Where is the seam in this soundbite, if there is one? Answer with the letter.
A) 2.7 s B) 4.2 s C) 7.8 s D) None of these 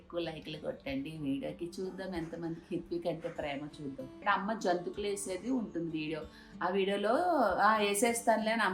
B